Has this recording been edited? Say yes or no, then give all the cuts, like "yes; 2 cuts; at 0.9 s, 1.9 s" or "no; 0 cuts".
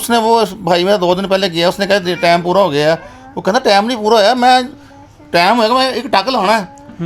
no; 0 cuts